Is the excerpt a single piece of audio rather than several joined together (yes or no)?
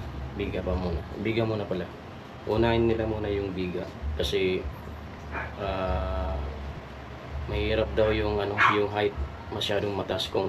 yes